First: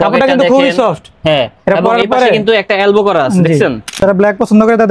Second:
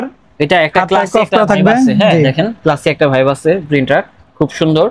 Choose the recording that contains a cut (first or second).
first